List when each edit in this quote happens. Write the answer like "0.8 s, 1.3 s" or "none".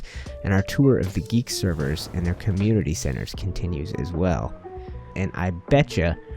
5.1 s